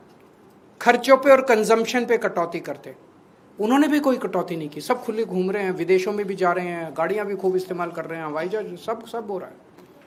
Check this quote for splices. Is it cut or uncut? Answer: uncut